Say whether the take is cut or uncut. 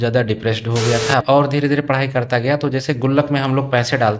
cut